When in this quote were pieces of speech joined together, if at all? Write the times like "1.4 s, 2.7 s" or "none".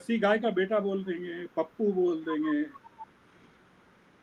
none